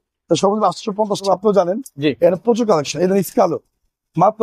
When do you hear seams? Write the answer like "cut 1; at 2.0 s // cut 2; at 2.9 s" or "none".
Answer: cut 1; at 1.2 s